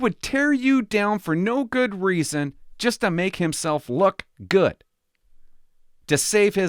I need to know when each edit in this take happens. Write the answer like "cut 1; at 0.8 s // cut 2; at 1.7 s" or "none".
none

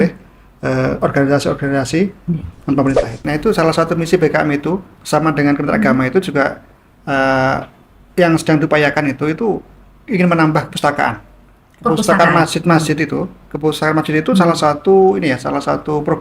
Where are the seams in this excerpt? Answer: cut 1; at 3.2 s

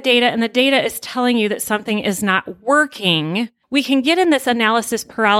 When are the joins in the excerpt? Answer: cut 1; at 3.6 s

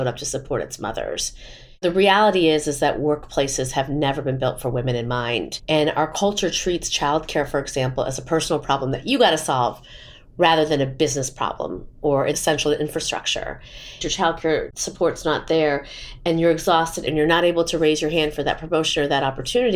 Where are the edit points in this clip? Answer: cut 1; at 5.5 s // cut 2; at 14.0 s // cut 3; at 17.1 s

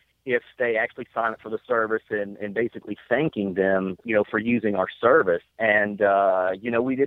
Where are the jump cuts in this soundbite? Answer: cut 1; at 4.0 s // cut 2; at 5.5 s

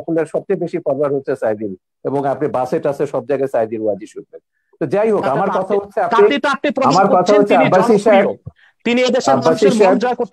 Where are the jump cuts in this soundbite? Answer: none

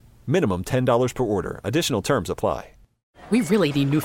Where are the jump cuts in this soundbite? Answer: cut 1; at 3.1 s

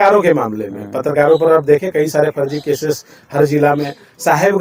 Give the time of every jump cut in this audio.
none

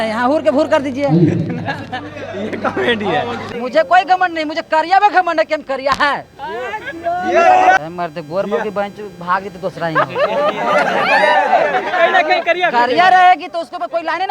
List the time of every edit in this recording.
cut 1; at 3.5 s // cut 2; at 7.8 s

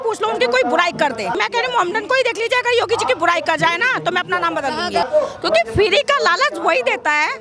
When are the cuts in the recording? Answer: cut 1; at 1.4 s // cut 2; at 5.0 s

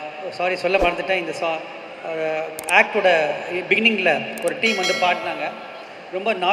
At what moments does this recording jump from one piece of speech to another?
none

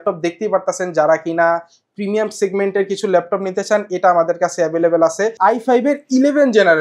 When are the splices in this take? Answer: cut 1; at 5.3 s

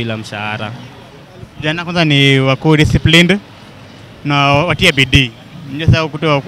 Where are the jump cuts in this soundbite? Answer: none

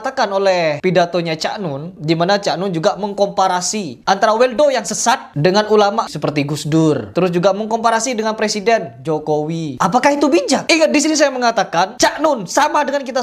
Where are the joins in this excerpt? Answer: cut 1; at 2.0 s

